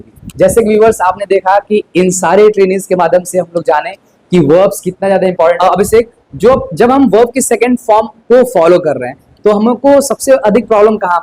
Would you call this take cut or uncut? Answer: cut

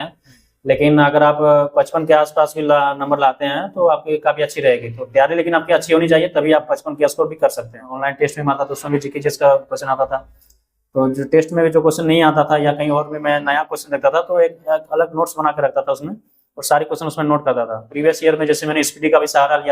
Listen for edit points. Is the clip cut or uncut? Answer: cut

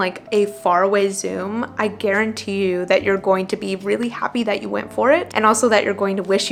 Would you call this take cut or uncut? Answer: uncut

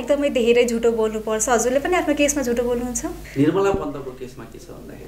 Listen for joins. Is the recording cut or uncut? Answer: cut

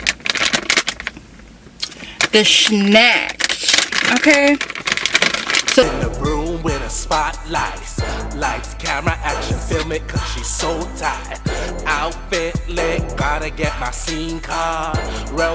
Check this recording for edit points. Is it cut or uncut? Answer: cut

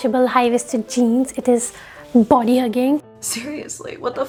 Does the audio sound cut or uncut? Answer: uncut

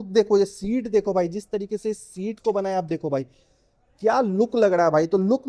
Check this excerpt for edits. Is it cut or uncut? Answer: uncut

